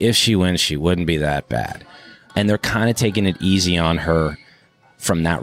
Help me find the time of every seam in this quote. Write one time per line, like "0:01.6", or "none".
0:02.2